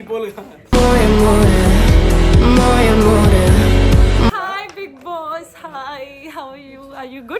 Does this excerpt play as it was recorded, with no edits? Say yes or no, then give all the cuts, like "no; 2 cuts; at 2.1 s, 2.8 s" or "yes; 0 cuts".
no; 1 cut; at 4.4 s